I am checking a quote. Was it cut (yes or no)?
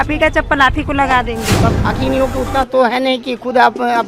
yes